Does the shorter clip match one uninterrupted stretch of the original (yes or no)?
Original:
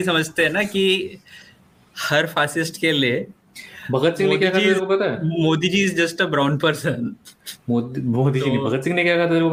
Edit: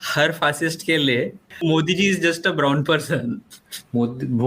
no